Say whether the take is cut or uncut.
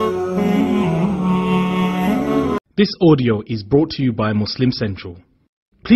cut